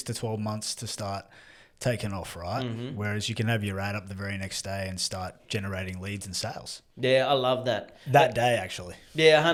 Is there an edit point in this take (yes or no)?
no